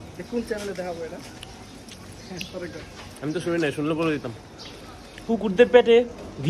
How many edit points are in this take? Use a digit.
1